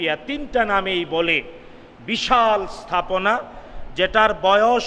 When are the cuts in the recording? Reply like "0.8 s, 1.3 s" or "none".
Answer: none

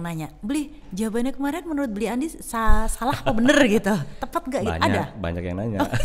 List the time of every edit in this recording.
none

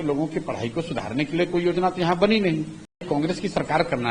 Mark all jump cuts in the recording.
3.1 s

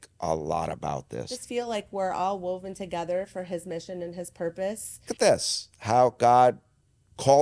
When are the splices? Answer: 1.3 s, 5.1 s

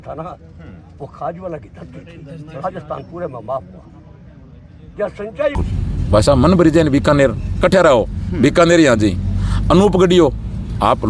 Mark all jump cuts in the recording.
5.6 s

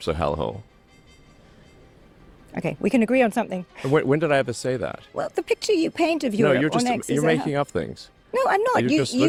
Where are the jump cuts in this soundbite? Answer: none

